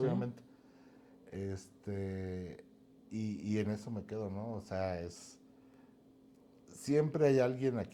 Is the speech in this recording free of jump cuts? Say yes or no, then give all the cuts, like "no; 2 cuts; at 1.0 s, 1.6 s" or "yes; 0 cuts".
yes; 0 cuts